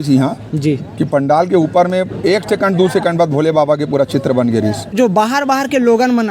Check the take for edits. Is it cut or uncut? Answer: cut